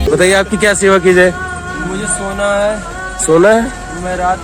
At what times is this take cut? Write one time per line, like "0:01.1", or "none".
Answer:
none

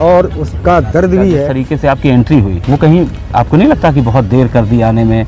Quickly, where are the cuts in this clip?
0:01.6
0:02.6

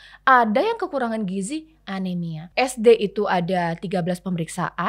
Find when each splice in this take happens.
0:02.4

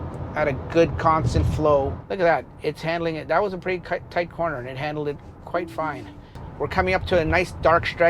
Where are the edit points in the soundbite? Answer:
0:02.0
0:06.4

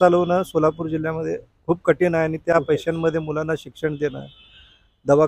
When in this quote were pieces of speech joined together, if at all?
none

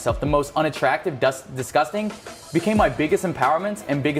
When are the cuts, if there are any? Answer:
none

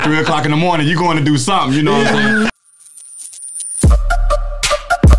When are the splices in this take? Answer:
0:02.6

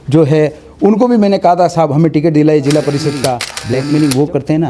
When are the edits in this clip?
0:03.5

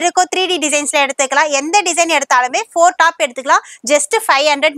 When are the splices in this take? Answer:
none

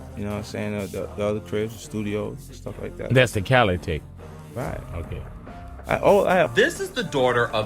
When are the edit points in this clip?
0:06.5

